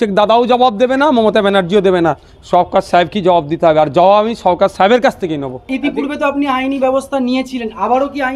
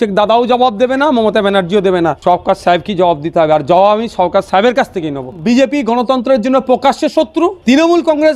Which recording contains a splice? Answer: second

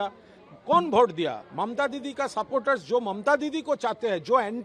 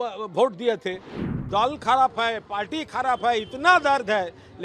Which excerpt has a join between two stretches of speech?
second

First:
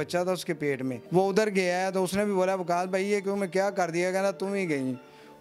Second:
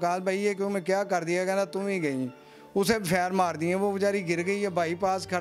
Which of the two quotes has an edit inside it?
first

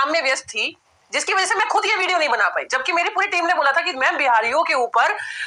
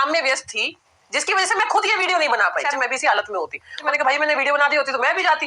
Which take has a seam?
second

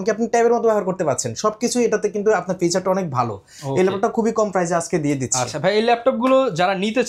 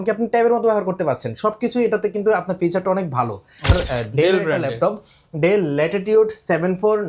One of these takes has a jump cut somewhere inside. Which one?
second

